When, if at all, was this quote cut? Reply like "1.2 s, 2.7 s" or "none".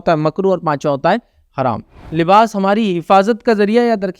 2.0 s